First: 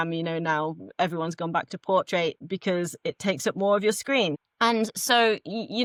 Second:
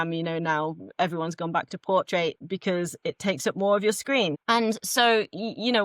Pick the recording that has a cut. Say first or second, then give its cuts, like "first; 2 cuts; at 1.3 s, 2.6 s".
second; 1 cut; at 4.4 s